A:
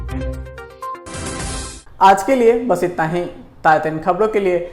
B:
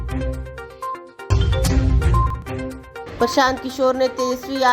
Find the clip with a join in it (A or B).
B